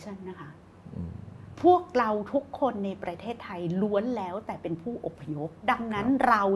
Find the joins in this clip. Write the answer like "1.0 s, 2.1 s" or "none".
5.6 s